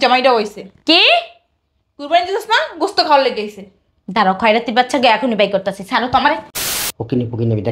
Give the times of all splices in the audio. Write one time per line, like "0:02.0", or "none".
0:06.6